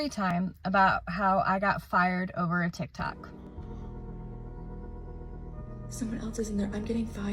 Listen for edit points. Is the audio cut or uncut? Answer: cut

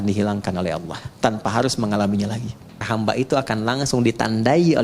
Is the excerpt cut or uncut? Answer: cut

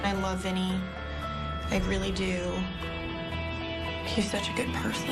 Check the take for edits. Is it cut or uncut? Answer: uncut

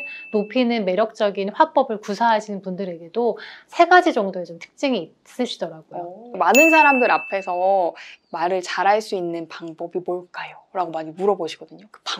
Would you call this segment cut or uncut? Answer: cut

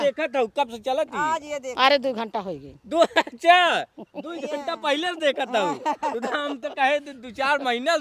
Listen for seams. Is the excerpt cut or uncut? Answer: uncut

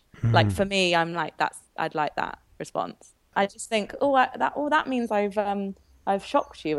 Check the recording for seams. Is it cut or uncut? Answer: cut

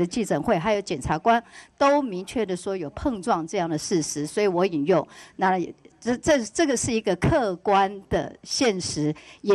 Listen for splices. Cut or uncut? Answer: uncut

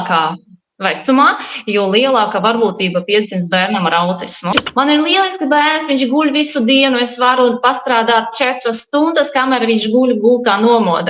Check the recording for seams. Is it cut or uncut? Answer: cut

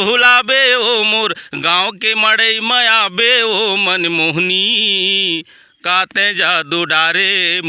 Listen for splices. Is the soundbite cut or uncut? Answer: uncut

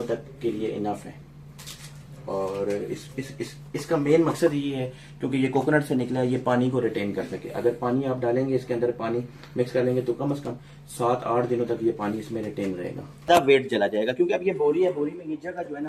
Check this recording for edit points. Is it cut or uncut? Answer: cut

